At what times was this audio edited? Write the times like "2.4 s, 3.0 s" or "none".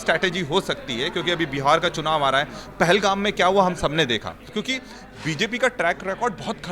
4.4 s